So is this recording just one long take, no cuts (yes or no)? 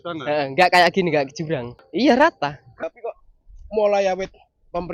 no